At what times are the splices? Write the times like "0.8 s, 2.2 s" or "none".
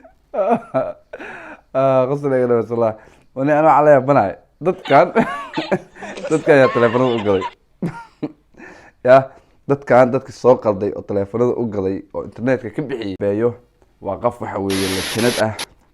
13.2 s